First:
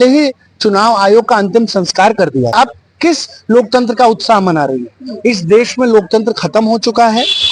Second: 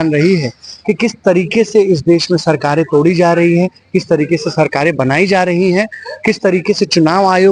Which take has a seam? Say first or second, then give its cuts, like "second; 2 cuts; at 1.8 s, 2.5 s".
first; 1 cut; at 2.5 s